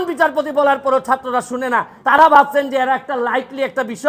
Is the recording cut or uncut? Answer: cut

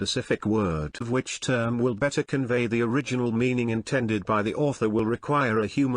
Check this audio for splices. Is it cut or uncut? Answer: cut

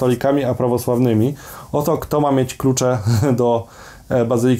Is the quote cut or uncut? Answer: uncut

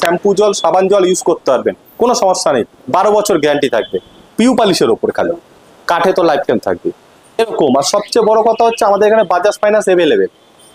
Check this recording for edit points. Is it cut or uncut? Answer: cut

